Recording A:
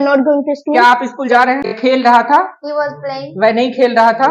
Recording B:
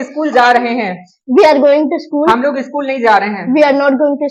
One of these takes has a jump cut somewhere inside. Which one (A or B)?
A